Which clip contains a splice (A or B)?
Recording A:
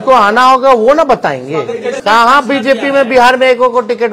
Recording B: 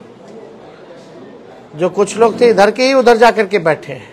A